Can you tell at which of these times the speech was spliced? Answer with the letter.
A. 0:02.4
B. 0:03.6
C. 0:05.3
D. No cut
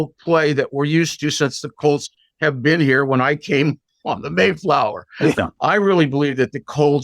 C